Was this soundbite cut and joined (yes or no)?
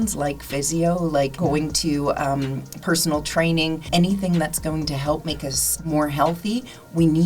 yes